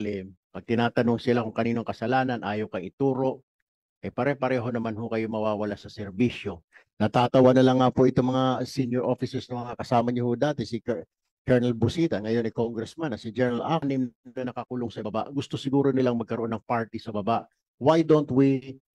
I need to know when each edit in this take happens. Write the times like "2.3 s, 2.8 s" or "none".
13.8 s